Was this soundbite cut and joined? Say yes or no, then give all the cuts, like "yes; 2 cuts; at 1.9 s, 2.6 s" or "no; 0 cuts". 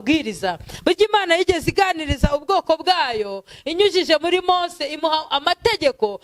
no; 0 cuts